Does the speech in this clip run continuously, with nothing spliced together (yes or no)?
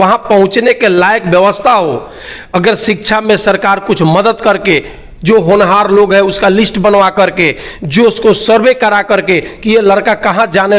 yes